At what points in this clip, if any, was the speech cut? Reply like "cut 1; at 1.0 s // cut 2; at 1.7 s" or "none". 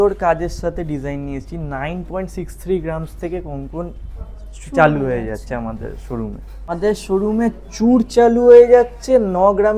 cut 1; at 6.7 s